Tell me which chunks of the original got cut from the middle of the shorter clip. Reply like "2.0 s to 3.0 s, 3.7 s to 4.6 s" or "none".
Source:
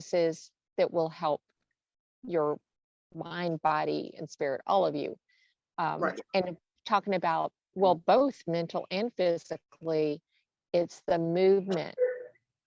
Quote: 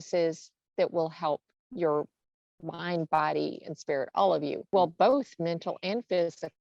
1.6 s to 2.1 s, 5.1 s to 7.7 s